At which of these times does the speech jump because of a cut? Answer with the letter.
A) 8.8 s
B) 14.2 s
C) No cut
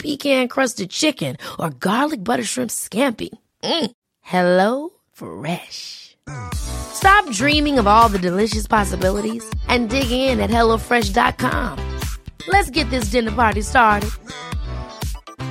C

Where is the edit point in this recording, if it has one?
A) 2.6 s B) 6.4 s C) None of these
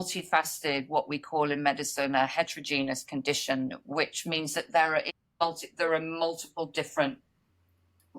C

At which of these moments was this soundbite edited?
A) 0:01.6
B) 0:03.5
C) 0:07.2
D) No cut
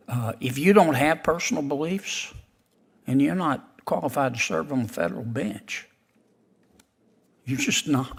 D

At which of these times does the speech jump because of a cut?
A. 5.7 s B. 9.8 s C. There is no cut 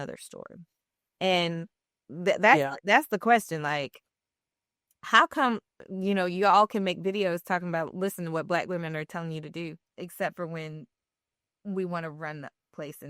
B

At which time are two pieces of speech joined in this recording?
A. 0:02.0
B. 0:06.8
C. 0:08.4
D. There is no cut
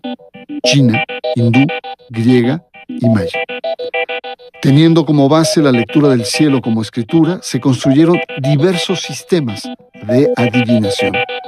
D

